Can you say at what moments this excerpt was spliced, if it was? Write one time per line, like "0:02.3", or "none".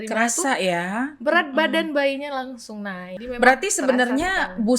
0:03.1